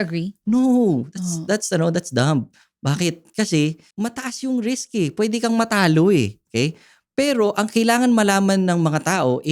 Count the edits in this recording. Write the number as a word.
zero